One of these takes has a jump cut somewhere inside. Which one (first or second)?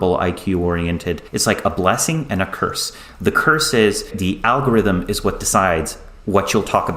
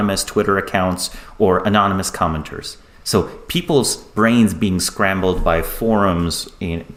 first